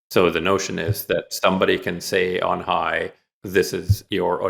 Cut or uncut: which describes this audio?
uncut